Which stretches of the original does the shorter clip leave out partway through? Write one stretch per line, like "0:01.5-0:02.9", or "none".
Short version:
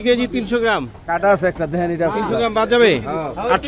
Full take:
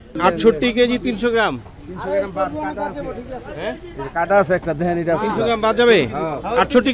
0:01.7-0:04.0